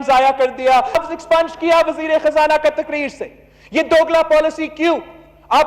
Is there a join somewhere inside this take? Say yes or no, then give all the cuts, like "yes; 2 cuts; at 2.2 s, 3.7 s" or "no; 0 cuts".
yes; 1 cut; at 0.9 s